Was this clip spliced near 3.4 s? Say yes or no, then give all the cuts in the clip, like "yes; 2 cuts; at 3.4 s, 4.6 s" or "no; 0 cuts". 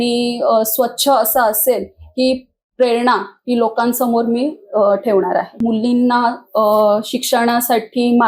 no; 1 cut; at 5.5 s